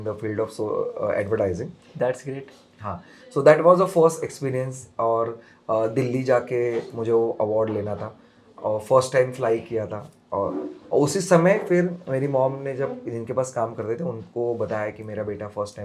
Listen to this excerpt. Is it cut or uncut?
uncut